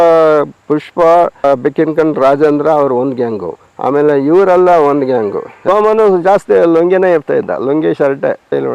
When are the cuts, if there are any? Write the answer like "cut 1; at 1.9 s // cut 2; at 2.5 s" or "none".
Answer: cut 1; at 1.4 s // cut 2; at 5.6 s